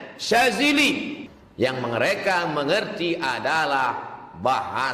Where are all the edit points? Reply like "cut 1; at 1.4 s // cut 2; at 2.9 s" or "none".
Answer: cut 1; at 1.2 s